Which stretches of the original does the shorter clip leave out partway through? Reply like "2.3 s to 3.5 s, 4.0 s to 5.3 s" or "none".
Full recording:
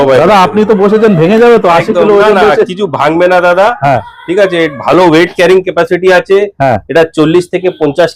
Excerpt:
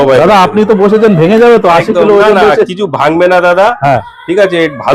none